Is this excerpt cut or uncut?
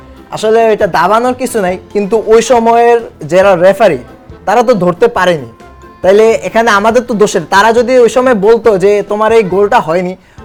uncut